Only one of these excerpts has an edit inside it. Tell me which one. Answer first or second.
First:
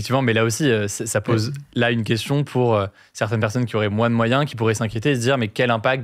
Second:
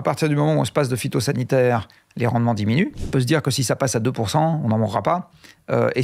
second